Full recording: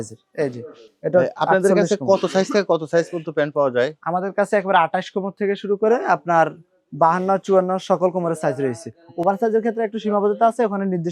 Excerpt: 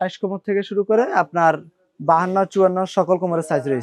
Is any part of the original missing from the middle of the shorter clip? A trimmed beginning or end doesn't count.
no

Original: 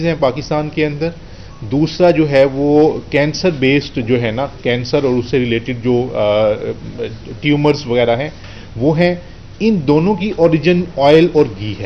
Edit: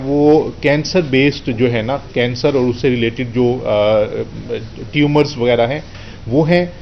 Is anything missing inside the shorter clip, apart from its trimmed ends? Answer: no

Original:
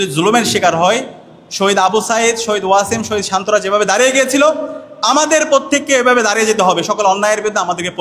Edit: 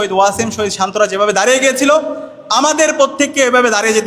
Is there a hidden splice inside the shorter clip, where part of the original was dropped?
no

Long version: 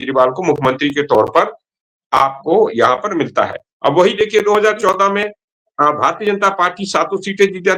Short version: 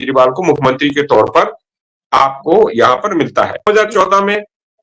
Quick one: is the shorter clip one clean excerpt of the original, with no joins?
no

